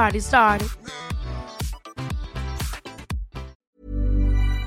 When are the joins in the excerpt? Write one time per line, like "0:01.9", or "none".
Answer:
0:03.6